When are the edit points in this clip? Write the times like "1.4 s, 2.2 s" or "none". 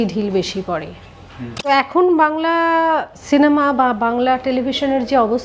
1.9 s, 3.1 s